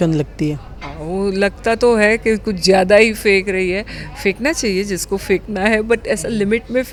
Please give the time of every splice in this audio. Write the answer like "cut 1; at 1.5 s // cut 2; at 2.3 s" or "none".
none